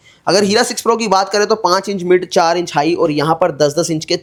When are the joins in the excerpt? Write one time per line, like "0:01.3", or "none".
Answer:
none